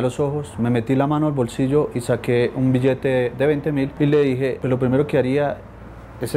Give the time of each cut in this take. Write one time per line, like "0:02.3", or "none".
0:03.9
0:04.6